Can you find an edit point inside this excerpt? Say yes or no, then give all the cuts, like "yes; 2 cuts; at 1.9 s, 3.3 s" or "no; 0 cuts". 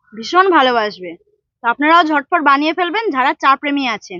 no; 0 cuts